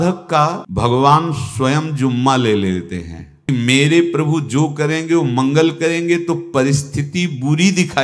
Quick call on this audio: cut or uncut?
cut